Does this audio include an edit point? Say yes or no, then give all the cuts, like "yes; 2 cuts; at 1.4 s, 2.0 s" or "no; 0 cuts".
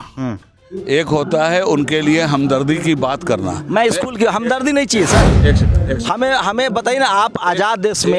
no; 0 cuts